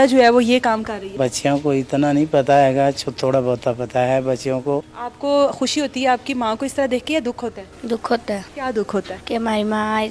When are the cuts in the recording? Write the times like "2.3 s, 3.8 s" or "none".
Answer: 1.1 s, 5.0 s, 8.5 s, 9.2 s